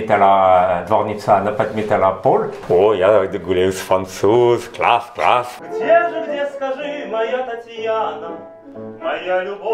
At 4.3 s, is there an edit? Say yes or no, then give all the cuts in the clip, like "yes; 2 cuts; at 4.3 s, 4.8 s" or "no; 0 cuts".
no; 2 cuts; at 2.6 s, 5.5 s